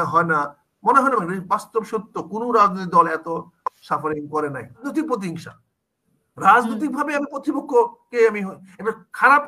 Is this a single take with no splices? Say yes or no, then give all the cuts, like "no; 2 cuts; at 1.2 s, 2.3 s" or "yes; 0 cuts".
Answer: no; 1 cut; at 4.8 s